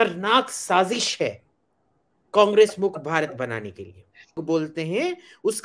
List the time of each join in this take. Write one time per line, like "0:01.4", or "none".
0:04.4